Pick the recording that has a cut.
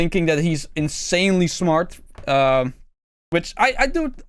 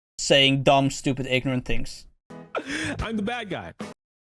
second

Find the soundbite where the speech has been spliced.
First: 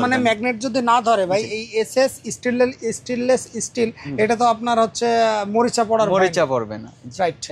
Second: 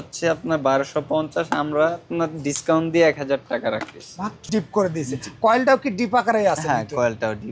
second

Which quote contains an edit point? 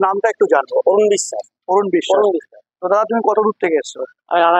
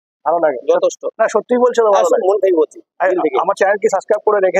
second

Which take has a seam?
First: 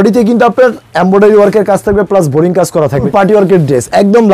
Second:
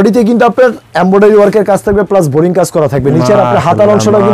first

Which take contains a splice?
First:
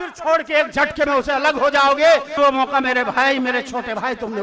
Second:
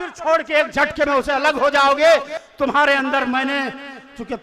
first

